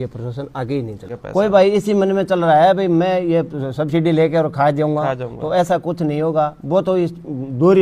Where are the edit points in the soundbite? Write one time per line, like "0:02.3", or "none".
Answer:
0:01.3